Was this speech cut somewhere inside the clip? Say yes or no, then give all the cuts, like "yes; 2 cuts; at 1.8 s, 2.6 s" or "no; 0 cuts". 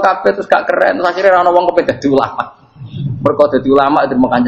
no; 0 cuts